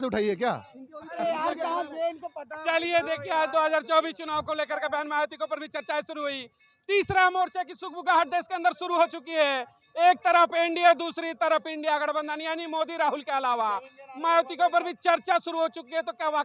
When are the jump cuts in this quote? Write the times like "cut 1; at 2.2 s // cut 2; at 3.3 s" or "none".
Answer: none